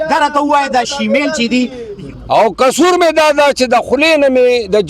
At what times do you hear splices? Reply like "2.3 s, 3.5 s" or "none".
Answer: 1.9 s